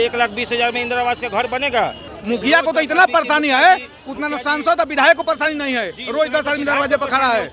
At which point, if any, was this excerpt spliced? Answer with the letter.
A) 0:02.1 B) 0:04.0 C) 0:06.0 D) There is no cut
A